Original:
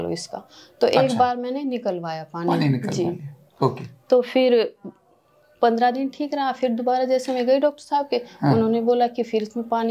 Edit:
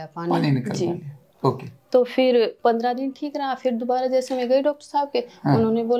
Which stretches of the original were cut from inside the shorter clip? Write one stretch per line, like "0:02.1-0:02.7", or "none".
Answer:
0:04.7-0:05.5